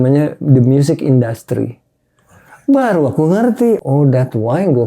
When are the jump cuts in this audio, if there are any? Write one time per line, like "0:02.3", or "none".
0:03.8